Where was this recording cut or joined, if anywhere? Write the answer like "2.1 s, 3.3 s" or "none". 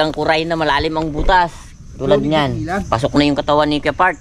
2.8 s